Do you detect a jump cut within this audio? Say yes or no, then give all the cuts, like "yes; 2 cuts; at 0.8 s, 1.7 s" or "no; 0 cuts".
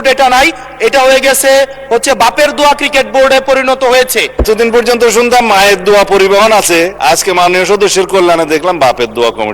yes; 2 cuts; at 4.5 s, 6.9 s